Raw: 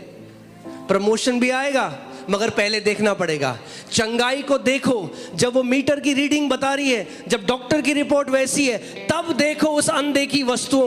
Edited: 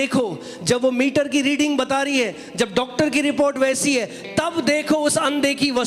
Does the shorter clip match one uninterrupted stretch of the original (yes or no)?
yes